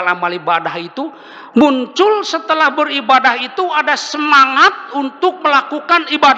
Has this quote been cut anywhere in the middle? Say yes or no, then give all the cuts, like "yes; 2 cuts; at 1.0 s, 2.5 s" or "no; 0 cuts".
no; 0 cuts